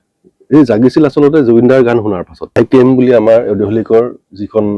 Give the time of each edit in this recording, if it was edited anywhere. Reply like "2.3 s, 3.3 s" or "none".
2.6 s